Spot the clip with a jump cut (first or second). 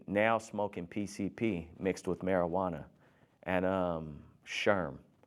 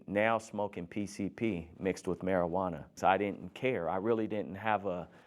second